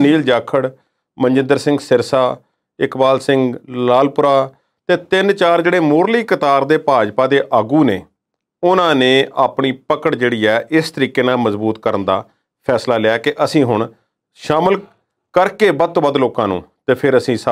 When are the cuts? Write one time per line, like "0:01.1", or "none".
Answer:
none